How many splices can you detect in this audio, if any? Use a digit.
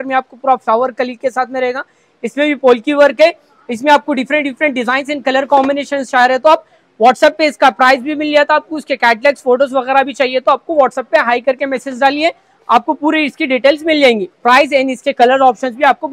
0